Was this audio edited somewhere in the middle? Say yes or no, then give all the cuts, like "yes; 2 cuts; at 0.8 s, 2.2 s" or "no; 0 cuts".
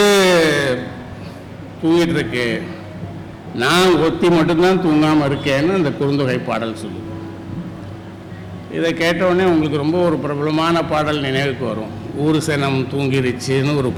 no; 0 cuts